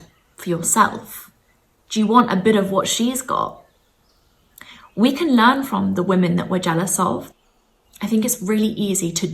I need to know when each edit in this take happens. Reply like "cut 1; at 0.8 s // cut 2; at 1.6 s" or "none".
cut 1; at 7.4 s